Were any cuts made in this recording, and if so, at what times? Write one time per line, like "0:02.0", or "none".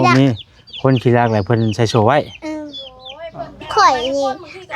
0:03.7